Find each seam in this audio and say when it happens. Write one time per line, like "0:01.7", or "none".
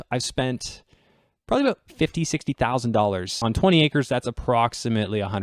0:03.3

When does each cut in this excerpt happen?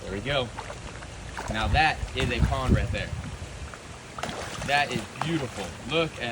none

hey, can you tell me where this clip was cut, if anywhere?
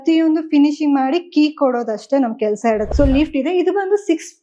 0:02.9

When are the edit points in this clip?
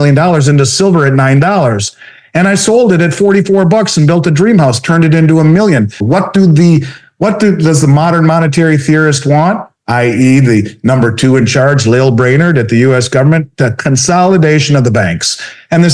0:06.0

